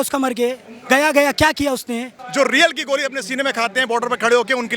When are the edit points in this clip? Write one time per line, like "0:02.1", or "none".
0:02.2